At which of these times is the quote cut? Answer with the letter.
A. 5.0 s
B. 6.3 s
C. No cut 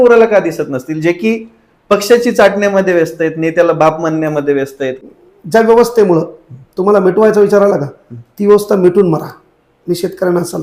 A